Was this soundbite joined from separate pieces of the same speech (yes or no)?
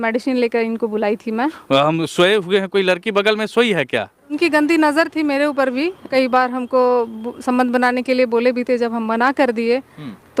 yes